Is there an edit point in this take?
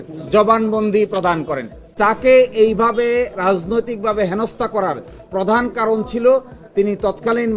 yes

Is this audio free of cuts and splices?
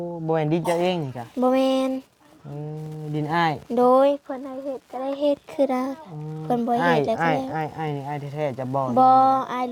yes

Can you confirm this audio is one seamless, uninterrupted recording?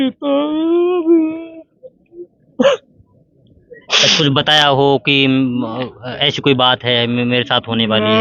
yes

